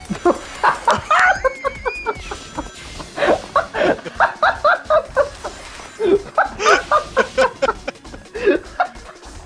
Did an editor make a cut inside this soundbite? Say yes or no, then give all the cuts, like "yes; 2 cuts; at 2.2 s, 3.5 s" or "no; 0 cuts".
no; 0 cuts